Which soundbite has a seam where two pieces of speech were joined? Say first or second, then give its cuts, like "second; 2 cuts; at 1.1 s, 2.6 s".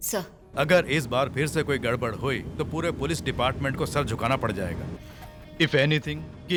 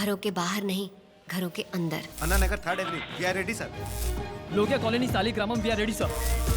second; 1 cut; at 2.1 s